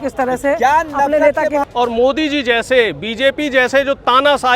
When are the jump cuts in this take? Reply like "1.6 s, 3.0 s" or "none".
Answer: 1.6 s